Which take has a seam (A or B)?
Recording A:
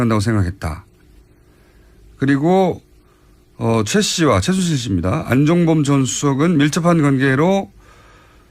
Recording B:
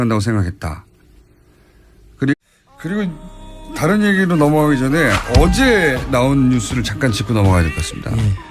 A